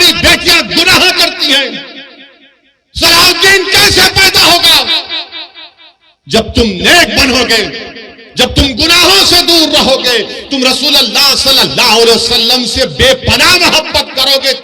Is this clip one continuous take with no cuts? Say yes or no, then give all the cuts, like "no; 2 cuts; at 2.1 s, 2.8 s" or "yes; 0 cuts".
yes; 0 cuts